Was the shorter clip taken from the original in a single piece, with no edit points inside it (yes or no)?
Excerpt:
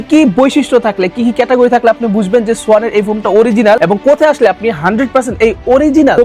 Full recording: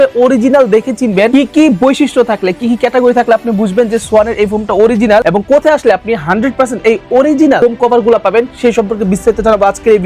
yes